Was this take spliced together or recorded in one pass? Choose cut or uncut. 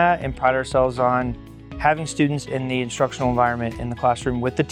uncut